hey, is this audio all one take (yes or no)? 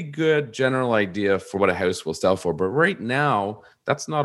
no